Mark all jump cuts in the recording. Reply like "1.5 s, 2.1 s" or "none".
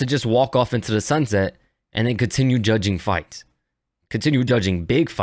none